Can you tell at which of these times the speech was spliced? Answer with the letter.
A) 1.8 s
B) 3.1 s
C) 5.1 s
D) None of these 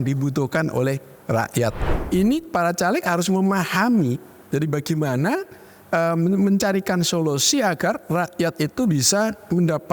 A